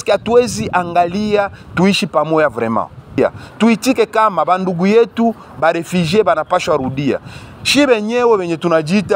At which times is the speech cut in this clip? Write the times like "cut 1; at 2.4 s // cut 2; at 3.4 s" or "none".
cut 1; at 3.2 s